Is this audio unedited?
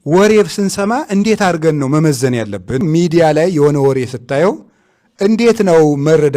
no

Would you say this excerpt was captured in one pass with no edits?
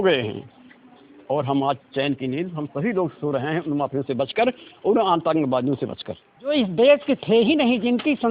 no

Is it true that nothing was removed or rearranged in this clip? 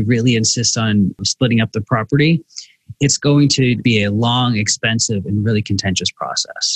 no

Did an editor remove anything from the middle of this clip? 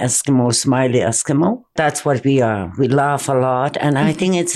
yes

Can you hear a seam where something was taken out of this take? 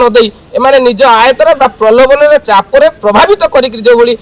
no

